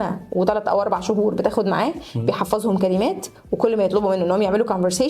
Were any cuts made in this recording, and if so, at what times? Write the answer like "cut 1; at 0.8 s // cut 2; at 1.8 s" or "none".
none